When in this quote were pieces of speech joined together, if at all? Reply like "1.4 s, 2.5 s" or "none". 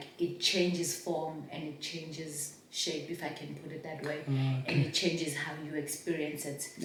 none